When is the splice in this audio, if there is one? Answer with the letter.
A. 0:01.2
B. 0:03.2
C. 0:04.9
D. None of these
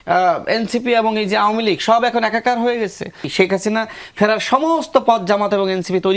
B